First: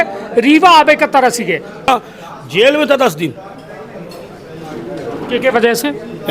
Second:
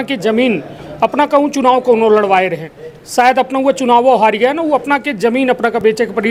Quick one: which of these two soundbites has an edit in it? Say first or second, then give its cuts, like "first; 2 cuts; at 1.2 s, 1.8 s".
first; 1 cut; at 1.9 s